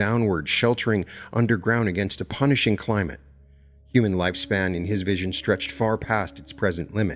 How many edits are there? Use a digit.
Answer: 0